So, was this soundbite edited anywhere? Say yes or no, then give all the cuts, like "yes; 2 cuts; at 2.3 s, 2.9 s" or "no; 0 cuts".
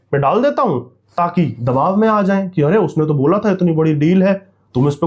no; 0 cuts